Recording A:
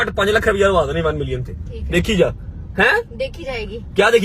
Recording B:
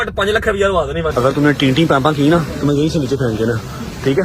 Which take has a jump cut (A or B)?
B